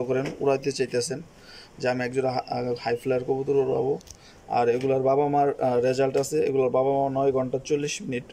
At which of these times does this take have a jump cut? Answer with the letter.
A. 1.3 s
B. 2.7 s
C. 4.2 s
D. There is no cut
D